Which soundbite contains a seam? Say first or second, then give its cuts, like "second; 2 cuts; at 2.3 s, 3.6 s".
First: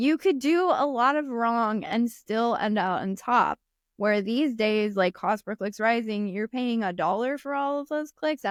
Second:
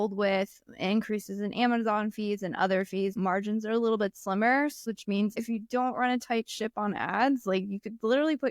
second; 2 cuts; at 3.1 s, 4.9 s